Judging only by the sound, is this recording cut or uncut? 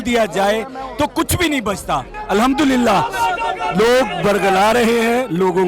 cut